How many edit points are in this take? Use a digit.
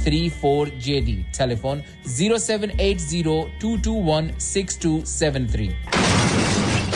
1